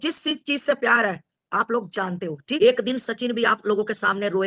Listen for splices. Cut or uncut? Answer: cut